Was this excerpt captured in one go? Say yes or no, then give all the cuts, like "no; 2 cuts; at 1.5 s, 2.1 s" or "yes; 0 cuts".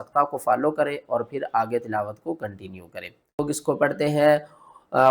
no; 1 cut; at 3.4 s